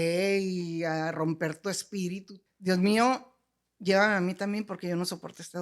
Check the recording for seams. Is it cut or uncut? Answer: cut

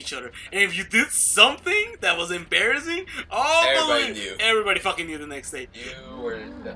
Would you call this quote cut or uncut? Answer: uncut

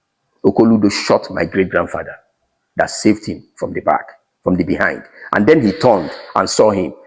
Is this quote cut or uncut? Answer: uncut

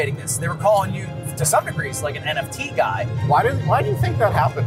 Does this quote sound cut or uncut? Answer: uncut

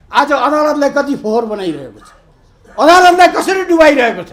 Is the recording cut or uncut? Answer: uncut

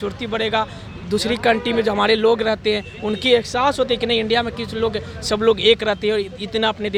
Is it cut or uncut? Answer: uncut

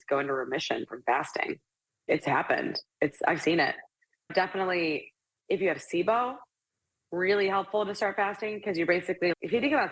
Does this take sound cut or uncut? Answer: uncut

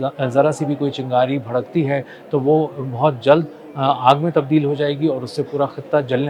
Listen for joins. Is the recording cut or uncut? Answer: uncut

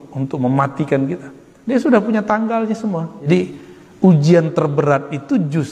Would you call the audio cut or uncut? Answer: cut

